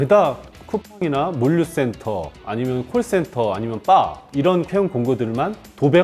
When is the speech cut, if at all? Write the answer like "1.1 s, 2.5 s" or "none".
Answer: none